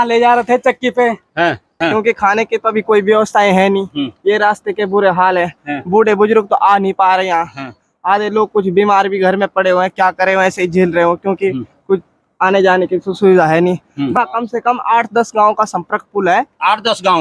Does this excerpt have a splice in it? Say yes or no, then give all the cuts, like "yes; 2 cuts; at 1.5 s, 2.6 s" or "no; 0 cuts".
yes; 2 cuts; at 1.7 s, 14.1 s